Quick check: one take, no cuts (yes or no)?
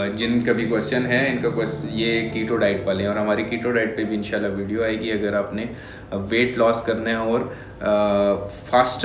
yes